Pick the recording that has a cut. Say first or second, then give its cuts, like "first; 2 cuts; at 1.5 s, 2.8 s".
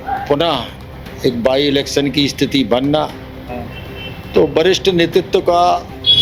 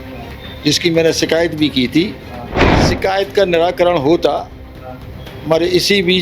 second; 1 cut; at 2.8 s